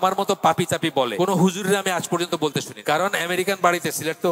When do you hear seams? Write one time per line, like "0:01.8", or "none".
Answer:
0:01.1
0:02.7